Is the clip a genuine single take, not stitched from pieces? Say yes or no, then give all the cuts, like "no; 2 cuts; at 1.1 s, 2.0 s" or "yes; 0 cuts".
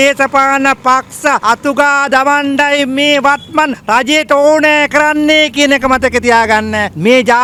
yes; 0 cuts